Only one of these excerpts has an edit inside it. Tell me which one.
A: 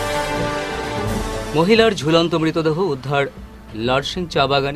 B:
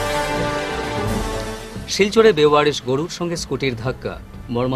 A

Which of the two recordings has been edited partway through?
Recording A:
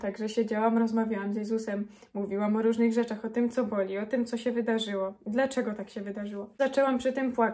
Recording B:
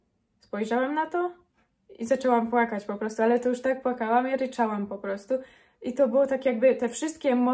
A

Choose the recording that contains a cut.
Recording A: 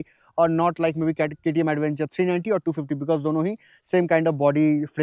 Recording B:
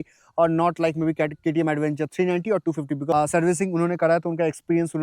B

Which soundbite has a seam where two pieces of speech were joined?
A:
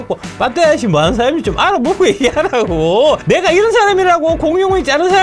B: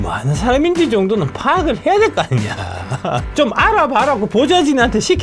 B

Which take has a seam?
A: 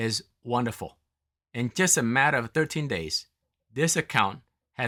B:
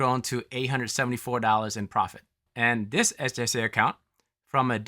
B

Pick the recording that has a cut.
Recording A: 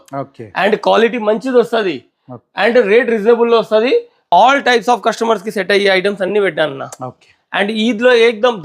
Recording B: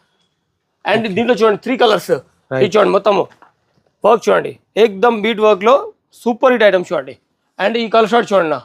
A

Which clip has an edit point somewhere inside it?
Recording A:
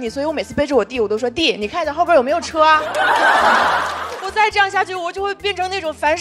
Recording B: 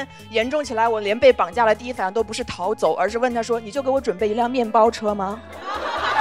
A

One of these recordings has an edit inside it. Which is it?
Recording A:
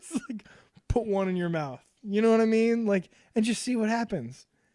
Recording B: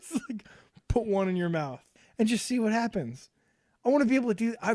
B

